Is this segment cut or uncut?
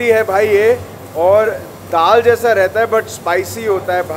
uncut